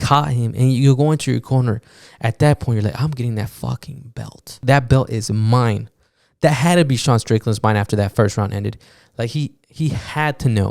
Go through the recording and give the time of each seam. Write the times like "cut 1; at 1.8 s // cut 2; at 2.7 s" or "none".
cut 1; at 4.6 s